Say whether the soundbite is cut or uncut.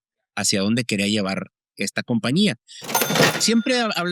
cut